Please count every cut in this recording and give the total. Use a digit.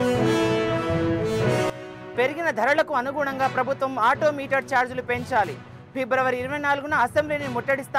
1